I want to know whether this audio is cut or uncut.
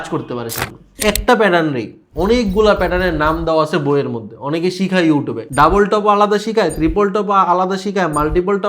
cut